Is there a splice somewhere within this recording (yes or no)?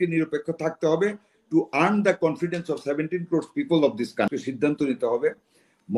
yes